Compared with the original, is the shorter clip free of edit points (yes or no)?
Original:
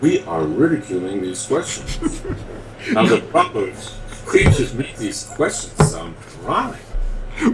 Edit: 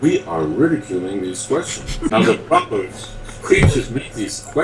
no